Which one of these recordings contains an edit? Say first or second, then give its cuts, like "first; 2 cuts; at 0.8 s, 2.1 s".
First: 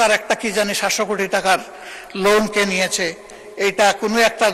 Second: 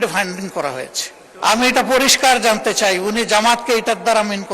second; 1 cut; at 1.2 s